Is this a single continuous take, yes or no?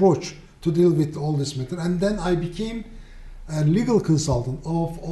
no